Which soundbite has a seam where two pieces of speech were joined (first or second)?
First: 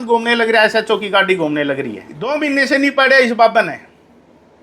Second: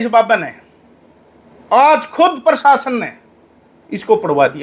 first